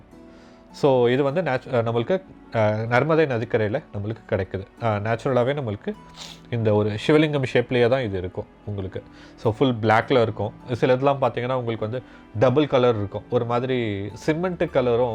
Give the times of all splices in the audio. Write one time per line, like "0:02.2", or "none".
none